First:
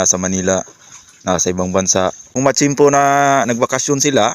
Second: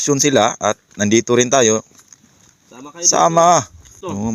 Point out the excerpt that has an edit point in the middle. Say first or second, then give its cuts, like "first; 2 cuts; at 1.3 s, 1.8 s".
first; 1 cut; at 2.2 s